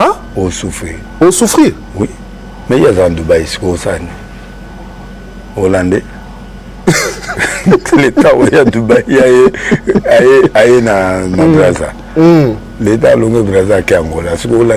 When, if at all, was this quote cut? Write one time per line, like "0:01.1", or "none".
none